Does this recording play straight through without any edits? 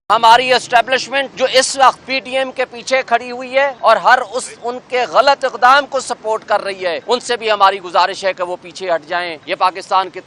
no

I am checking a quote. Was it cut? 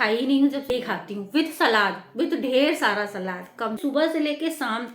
yes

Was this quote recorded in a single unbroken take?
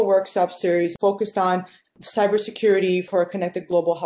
yes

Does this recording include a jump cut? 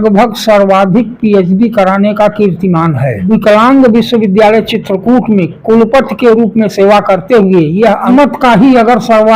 yes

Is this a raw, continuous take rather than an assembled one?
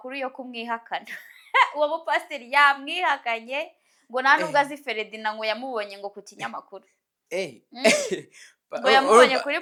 yes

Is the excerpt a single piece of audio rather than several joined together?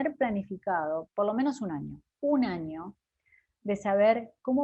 no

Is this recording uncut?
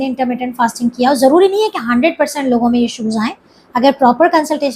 yes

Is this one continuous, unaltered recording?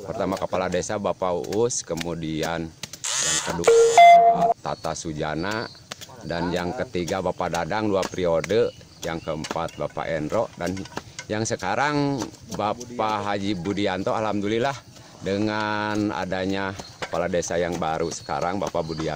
yes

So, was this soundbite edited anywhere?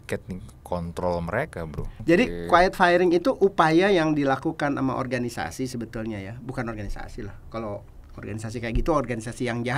yes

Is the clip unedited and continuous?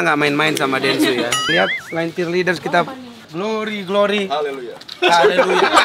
no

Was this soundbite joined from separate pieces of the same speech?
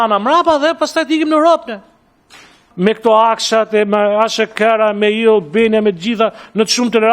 yes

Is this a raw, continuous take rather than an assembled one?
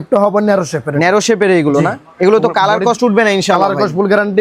yes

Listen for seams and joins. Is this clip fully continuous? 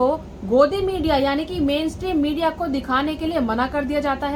yes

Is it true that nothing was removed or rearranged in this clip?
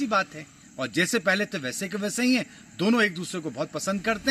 yes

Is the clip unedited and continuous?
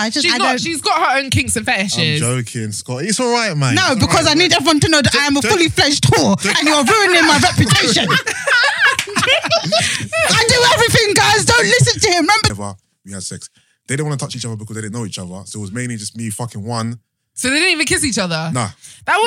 no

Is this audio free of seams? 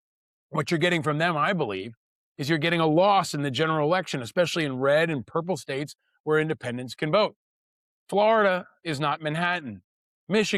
yes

